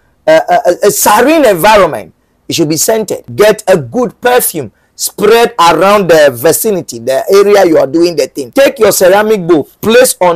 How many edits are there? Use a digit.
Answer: 2